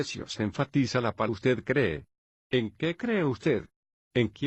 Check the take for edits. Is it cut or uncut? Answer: uncut